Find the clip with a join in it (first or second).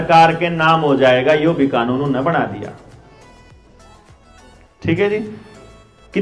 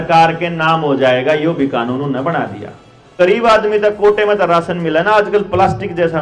second